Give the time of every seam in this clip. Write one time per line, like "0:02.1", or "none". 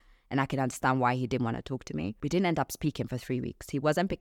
0:02.2